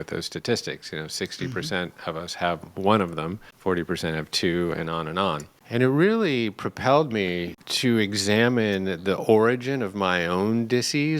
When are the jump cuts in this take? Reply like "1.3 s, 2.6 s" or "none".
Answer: 3.4 s, 5.5 s, 7.6 s